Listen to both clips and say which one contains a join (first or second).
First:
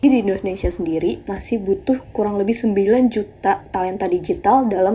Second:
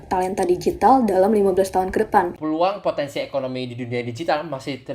second